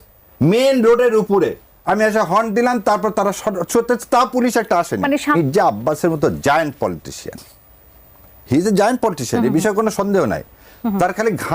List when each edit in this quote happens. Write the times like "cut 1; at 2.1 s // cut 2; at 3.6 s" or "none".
cut 1; at 5.4 s